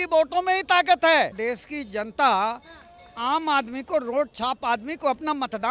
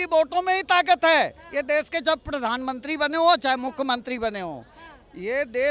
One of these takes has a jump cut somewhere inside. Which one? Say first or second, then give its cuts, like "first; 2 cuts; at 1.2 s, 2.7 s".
first; 1 cut; at 1.4 s